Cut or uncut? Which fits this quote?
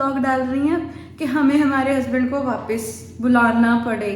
uncut